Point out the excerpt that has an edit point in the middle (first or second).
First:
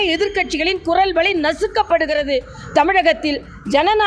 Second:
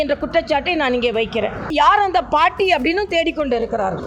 second